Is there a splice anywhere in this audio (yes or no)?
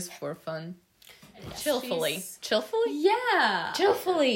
yes